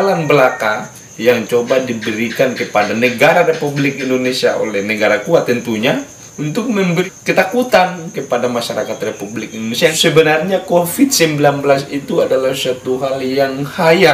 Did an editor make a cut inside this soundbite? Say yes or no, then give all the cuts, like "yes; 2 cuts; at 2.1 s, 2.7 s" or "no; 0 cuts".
yes; 1 cut; at 10.0 s